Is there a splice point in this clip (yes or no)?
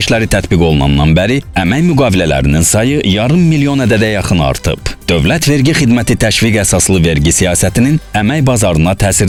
no